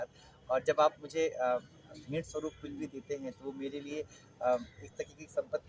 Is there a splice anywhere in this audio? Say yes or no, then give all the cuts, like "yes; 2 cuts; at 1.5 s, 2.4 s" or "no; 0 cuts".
no; 0 cuts